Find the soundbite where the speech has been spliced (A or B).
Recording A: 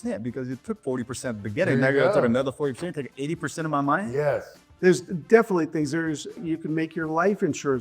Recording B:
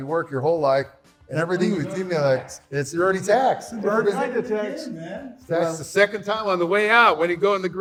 A